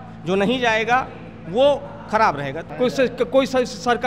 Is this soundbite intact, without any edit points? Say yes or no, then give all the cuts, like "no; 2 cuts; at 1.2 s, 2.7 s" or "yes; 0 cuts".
no; 1 cut; at 2.7 s